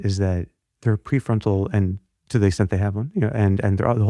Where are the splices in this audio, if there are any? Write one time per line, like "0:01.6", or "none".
none

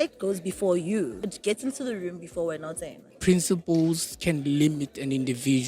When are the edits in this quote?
0:01.2
0:03.1

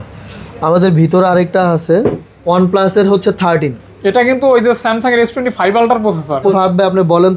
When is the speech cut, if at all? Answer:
0:02.3
0:06.5

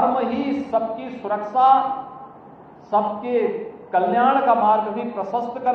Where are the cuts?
none

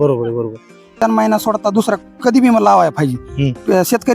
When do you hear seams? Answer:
0:01.0

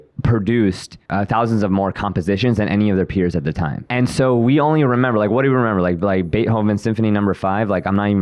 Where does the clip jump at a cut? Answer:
0:01.0
0:03.8

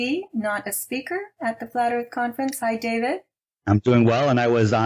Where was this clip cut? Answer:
0:03.2

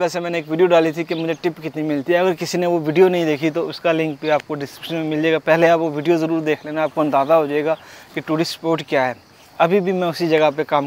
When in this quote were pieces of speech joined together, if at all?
none

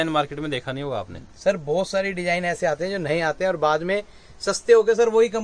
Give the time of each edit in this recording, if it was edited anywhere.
none

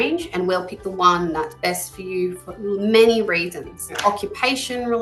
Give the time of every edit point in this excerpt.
0:03.9

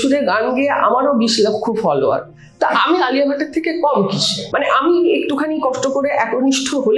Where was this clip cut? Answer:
0:04.4

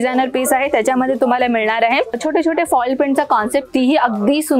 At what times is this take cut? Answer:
none

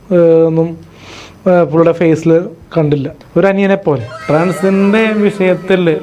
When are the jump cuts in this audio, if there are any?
0:03.2
0:04.1

